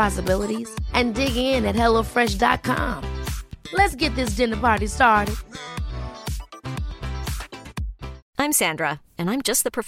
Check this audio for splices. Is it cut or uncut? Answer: cut